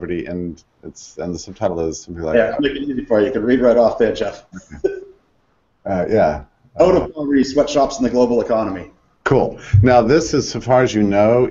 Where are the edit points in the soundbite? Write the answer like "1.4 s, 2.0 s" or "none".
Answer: none